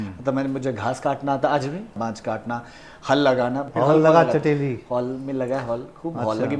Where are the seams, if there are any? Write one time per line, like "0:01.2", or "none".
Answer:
0:02.0
0:03.7